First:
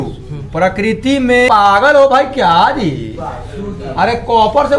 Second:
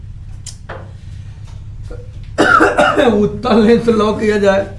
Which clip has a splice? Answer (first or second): first